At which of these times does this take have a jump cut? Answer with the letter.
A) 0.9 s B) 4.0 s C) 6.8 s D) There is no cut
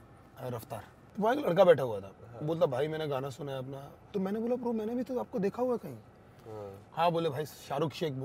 A